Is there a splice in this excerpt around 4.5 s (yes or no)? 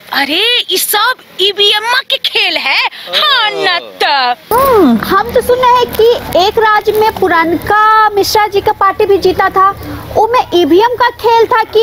yes